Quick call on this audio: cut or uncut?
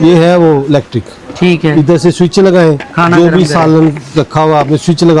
uncut